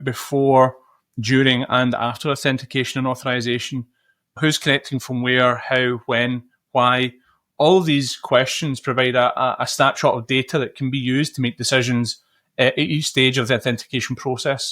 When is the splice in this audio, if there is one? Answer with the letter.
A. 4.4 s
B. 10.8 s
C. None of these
A